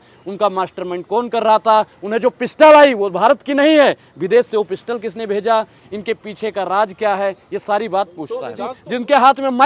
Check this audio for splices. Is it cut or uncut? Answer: cut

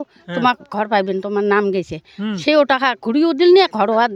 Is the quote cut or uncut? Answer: uncut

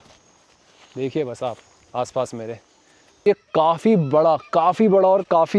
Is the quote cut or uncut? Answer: cut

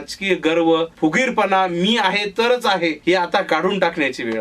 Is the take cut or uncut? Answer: cut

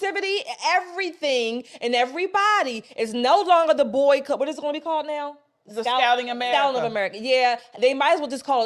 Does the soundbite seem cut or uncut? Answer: uncut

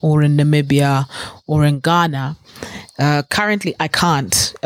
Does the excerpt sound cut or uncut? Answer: uncut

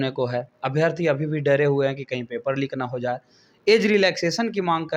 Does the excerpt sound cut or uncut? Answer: uncut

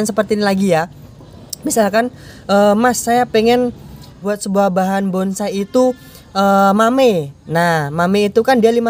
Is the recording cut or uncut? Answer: cut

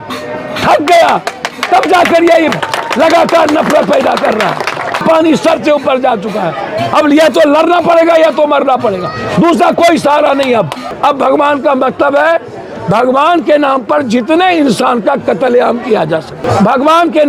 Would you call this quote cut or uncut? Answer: cut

